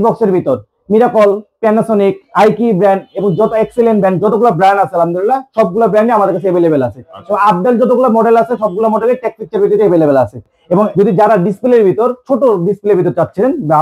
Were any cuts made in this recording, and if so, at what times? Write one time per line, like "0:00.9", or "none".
0:10.9